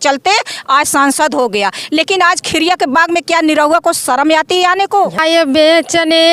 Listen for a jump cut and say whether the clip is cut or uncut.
cut